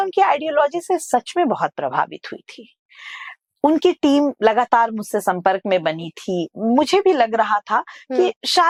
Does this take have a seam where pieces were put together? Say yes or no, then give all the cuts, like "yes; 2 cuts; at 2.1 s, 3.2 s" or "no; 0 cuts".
no; 0 cuts